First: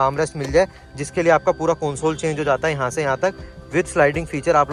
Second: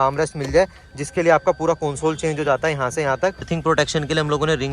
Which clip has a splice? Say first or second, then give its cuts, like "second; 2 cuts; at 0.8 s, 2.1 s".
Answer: second; 1 cut; at 3.5 s